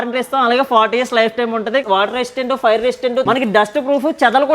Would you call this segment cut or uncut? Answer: cut